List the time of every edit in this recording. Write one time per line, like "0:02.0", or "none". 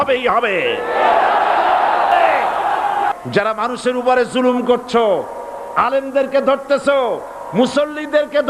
0:03.1